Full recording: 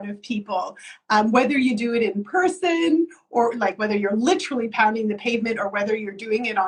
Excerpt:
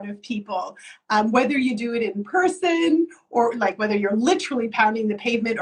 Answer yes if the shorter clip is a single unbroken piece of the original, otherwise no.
yes